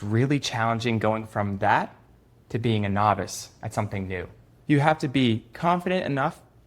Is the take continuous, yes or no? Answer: no